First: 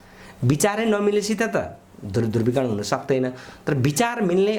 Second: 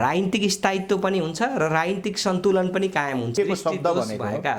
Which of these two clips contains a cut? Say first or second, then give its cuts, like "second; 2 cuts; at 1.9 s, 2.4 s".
second; 1 cut; at 3.3 s